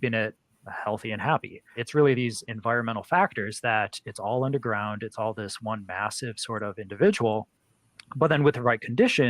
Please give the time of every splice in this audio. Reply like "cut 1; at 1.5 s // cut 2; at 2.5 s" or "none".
cut 1; at 1.8 s